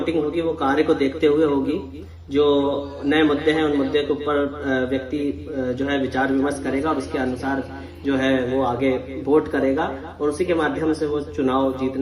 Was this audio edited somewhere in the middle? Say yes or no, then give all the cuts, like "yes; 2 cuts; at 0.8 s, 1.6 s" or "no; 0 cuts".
no; 0 cuts